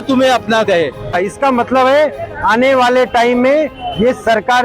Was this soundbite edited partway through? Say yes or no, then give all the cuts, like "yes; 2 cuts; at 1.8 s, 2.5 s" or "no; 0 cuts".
yes; 1 cut; at 1.2 s